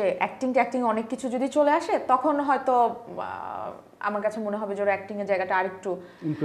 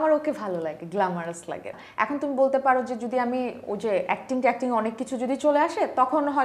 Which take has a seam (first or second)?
second